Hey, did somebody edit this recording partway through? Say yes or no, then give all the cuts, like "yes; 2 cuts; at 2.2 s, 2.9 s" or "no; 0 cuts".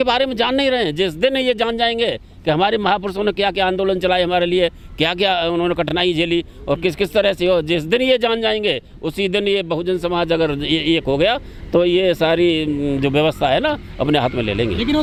no; 0 cuts